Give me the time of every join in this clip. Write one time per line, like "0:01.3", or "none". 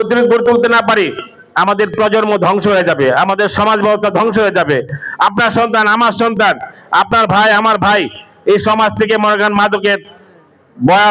none

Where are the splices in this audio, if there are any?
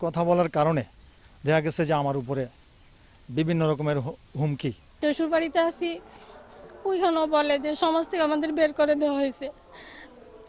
none

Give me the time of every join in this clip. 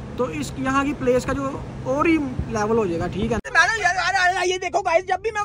0:03.4

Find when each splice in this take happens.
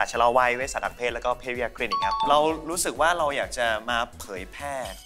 0:02.3

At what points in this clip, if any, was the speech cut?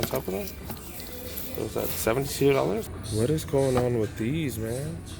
0:02.9

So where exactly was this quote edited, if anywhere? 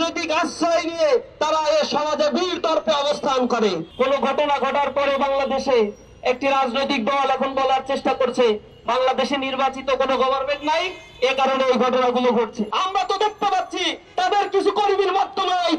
0:03.8
0:12.6

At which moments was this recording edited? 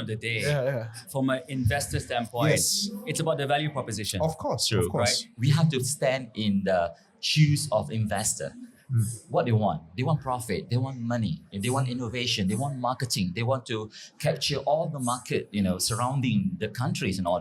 0:01.0
0:05.3

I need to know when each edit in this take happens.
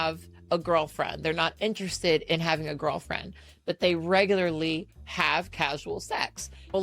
none

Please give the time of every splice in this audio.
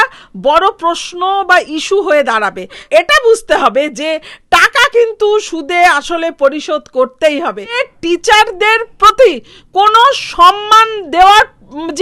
0:02.8
0:07.7

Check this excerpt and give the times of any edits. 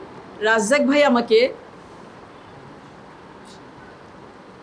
none

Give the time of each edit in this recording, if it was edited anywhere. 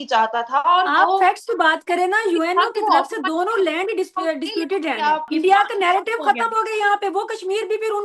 0:05.3

